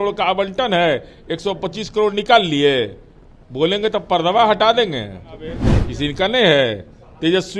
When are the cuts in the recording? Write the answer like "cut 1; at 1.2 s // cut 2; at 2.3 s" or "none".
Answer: cut 1; at 5.7 s